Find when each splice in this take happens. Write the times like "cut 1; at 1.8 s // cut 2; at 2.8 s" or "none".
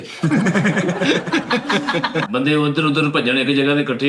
cut 1; at 2.3 s